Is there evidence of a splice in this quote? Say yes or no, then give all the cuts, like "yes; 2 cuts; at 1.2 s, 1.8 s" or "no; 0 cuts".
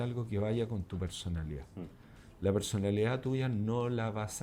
no; 0 cuts